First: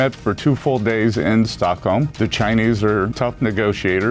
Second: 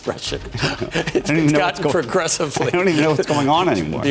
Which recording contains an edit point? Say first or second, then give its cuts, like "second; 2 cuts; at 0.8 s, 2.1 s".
first; 2 cuts; at 2.1 s, 3.1 s